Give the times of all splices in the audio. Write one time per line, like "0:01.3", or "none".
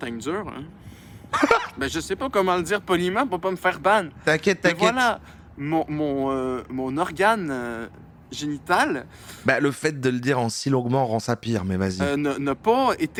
none